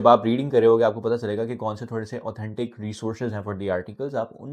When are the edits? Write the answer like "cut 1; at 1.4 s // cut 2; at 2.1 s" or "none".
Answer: none